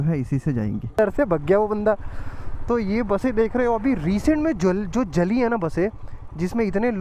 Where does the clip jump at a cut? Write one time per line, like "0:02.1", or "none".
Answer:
0:01.0